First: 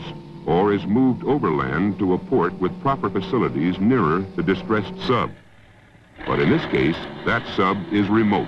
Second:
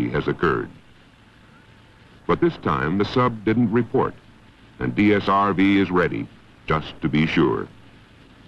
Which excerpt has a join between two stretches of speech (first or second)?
second